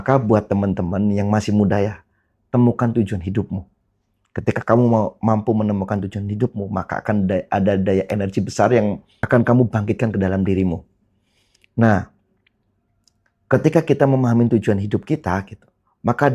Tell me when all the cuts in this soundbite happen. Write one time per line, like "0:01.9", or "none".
0:09.1

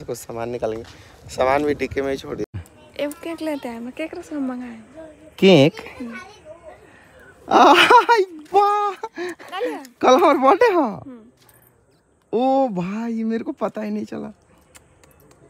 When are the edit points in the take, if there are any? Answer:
0:02.6

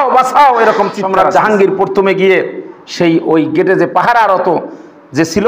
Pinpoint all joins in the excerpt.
0:01.0

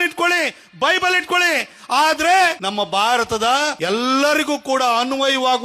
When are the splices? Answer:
0:02.6
0:03.8

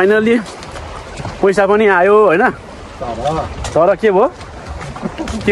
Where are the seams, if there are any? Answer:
none

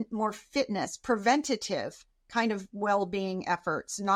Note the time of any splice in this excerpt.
none

